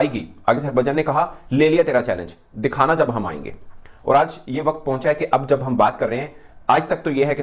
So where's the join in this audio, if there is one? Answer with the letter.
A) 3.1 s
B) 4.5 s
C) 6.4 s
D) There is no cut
D